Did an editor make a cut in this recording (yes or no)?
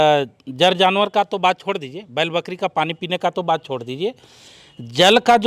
no